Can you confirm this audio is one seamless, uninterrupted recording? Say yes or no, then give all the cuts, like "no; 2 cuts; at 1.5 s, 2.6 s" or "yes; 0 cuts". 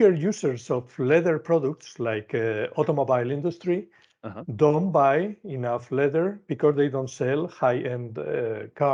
yes; 0 cuts